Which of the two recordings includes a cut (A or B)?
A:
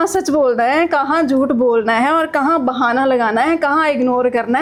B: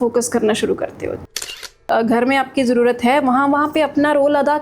B